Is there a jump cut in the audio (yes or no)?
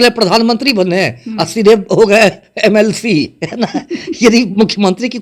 no